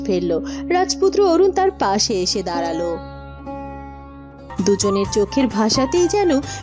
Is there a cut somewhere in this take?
yes; 1 cut; at 4.5 s

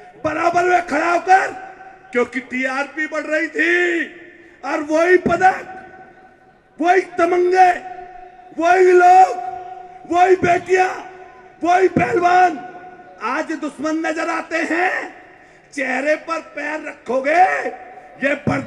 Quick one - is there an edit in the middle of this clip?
no; 0 cuts

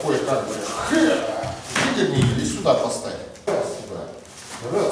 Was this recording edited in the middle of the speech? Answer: yes; 1 cut; at 3.5 s

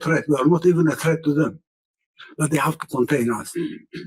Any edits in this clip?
no; 0 cuts

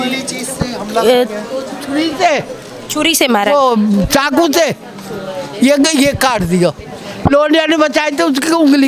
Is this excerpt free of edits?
yes; 0 cuts

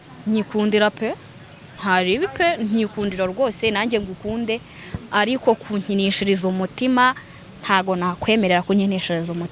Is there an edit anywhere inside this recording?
no; 0 cuts

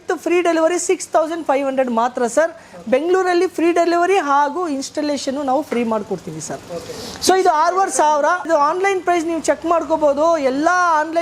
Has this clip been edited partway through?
no; 0 cuts

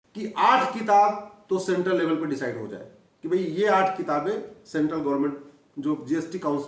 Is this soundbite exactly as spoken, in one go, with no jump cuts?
yes; 0 cuts

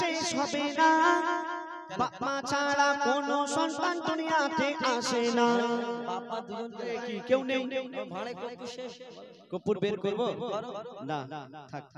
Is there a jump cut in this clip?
yes; 1 cut; at 6.9 s

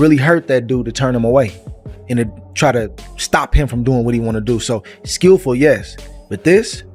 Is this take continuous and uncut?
yes; 0 cuts

